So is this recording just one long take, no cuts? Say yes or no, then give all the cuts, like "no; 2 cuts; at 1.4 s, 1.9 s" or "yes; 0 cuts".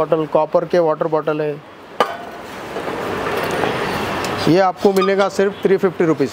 yes; 0 cuts